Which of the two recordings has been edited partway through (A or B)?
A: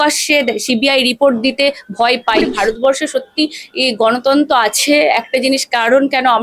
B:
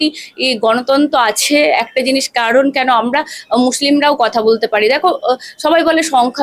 A